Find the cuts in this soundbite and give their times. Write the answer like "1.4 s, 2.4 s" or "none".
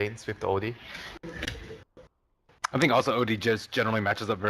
3.4 s

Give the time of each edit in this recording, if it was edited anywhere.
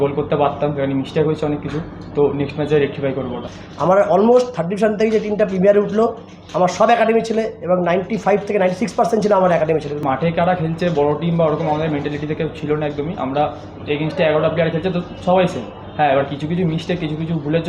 3.5 s, 10.0 s

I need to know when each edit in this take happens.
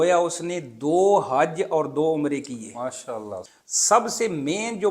3.5 s

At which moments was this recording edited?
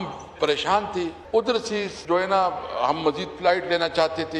1.2 s, 1.9 s

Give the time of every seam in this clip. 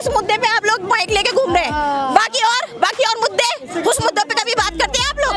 3.6 s

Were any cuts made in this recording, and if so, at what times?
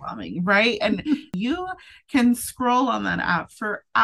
1.3 s

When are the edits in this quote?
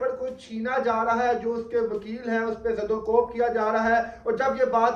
none

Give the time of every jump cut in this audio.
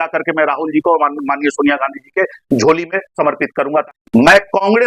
3.9 s

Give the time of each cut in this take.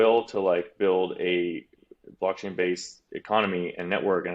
3.0 s

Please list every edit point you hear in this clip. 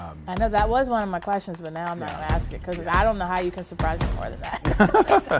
none

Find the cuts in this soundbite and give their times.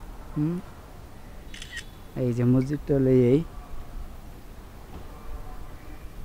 none

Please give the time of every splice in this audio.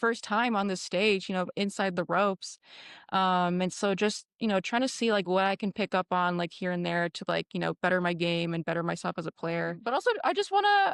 9.8 s

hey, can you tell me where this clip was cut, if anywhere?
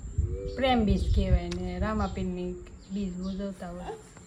none

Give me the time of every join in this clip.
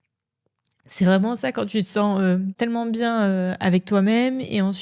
2.5 s

